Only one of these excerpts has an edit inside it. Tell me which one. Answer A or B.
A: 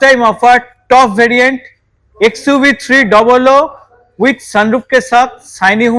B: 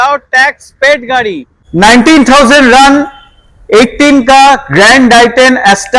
B